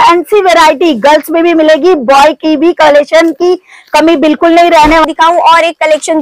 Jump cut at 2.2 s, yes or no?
no